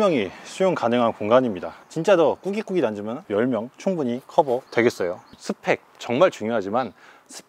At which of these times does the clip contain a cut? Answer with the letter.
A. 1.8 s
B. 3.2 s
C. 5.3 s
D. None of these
C